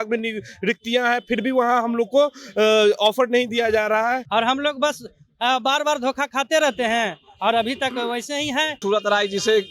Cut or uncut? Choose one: cut